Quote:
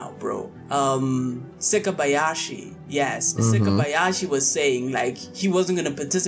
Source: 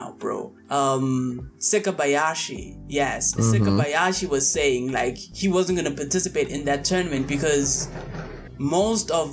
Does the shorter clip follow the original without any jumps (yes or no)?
yes